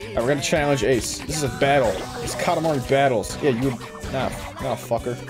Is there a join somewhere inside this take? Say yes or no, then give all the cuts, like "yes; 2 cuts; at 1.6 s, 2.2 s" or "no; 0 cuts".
no; 0 cuts